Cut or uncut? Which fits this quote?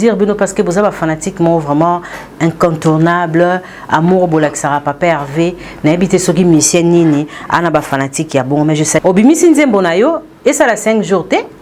cut